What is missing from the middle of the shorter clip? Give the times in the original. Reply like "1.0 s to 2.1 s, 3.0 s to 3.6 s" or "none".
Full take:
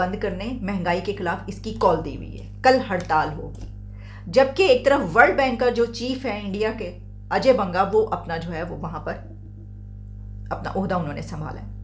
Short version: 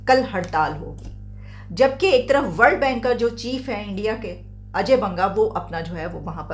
none